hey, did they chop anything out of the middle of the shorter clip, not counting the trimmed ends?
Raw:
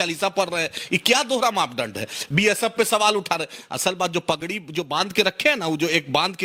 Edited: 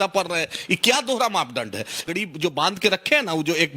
yes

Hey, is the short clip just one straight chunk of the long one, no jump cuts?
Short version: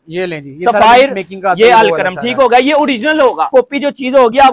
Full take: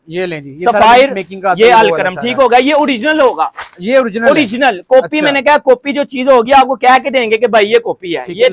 no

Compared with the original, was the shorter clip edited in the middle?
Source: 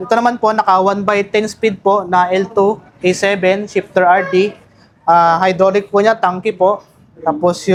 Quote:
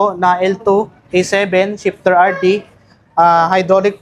no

